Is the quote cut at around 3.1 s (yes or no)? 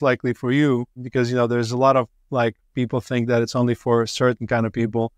no